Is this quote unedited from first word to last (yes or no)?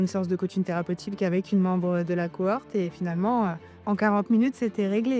yes